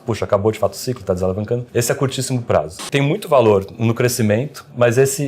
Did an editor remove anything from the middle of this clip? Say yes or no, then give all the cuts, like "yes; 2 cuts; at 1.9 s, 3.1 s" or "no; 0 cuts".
yes; 2 cuts; at 1.7 s, 2.8 s